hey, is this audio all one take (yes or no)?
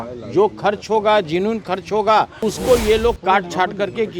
no